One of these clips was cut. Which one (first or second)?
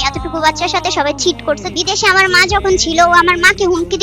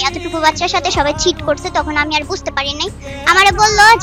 first